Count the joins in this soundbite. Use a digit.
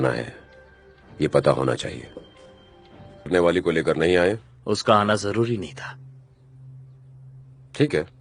1